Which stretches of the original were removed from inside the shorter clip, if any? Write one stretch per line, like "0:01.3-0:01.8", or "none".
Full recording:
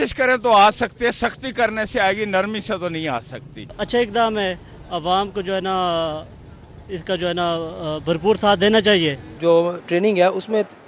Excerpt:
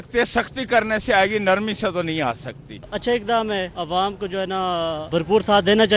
0:04.6-0:04.9
0:06.2-0:08.0